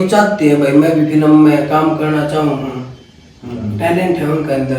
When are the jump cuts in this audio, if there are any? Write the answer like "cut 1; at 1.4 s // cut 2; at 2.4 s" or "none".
none

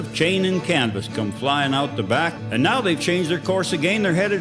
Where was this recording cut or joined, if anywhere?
cut 1; at 2.4 s

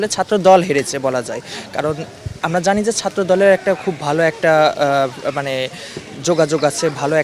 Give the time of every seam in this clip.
none

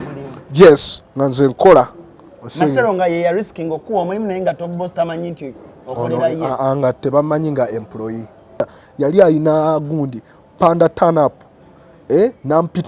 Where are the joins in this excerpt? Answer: cut 1; at 8.8 s

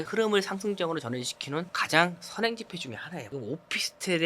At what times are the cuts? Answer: cut 1; at 3.2 s

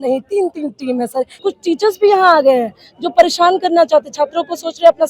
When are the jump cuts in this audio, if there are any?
cut 1; at 1.4 s

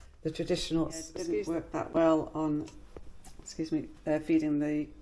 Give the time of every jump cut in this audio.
cut 1; at 1.2 s

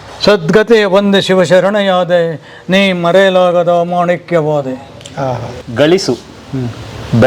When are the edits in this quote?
cut 1; at 5.6 s

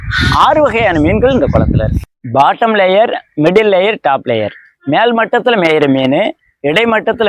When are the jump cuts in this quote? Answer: cut 1; at 2.0 s

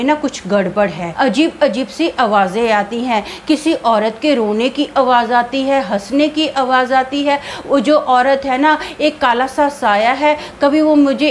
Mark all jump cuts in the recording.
cut 1; at 1.1 s

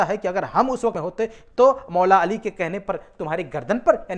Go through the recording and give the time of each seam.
cut 1; at 1.0 s

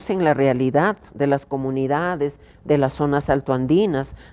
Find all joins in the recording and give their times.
none

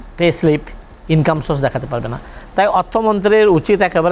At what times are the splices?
none

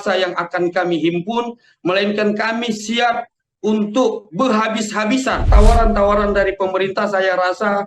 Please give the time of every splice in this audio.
cut 1; at 5.5 s

